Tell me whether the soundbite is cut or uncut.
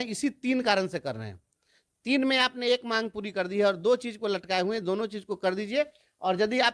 uncut